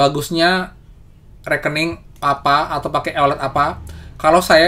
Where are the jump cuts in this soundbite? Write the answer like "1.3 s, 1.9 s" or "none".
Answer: none